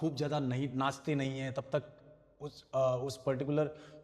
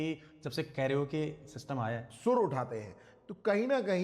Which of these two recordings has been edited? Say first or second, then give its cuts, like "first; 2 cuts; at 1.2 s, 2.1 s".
second; 1 cut; at 2.1 s